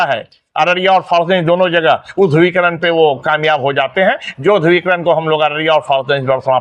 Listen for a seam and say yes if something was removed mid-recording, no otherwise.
no